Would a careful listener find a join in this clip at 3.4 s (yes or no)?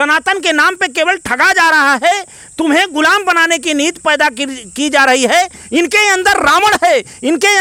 no